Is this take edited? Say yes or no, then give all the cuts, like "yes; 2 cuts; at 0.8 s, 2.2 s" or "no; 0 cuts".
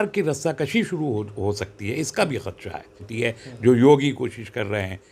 yes; 1 cut; at 3.0 s